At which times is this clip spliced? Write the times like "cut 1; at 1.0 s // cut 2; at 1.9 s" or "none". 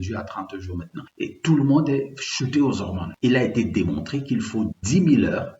cut 1; at 1.0 s // cut 2; at 3.0 s